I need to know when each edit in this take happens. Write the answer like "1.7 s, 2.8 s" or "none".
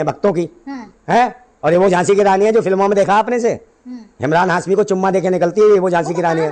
none